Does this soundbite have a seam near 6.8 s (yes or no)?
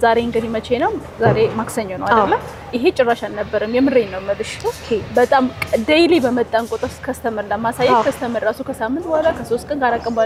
no